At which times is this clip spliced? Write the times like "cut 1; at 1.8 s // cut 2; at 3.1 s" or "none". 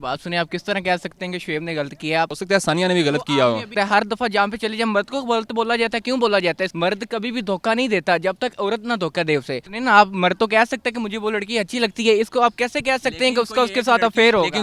cut 1; at 2.3 s // cut 2; at 3.7 s // cut 3; at 6.7 s // cut 4; at 9.6 s